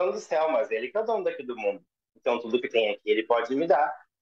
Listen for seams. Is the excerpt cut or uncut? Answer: uncut